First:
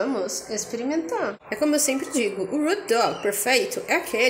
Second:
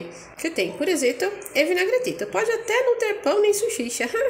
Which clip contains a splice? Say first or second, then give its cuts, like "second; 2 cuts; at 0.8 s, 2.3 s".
first; 1 cut; at 1.4 s